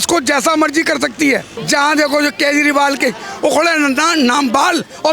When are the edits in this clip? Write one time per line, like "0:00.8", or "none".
0:01.5